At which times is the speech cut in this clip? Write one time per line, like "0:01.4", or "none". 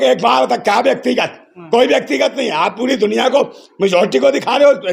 none